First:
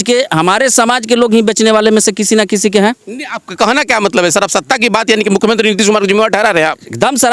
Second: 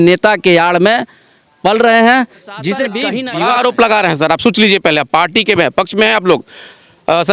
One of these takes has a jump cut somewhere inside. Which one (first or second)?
second